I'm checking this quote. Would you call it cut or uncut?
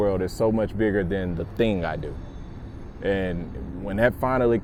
uncut